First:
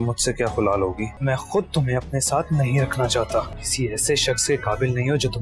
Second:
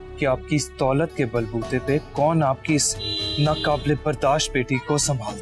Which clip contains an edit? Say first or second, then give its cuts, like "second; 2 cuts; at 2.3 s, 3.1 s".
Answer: first; 2 cuts; at 1.1 s, 3.6 s